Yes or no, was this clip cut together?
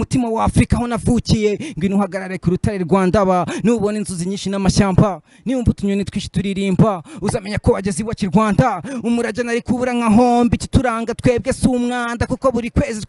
no